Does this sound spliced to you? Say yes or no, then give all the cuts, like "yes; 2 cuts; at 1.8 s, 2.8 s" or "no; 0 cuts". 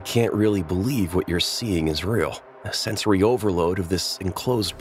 no; 0 cuts